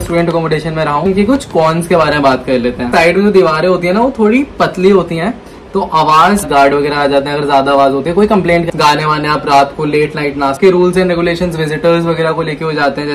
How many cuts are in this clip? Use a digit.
5